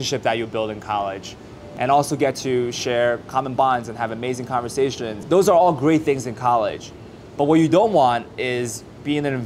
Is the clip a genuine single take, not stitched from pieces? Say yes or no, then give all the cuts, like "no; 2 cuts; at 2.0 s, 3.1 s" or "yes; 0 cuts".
no; 2 cuts; at 1.7 s, 5.1 s